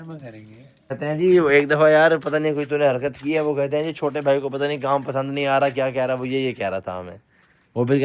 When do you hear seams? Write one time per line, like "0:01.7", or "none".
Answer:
0:01.0